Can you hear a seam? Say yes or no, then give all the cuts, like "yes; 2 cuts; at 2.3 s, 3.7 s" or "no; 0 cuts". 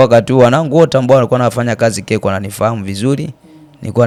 no; 0 cuts